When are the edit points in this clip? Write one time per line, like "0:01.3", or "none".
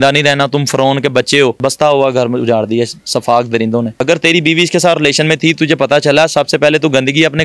0:01.6
0:04.0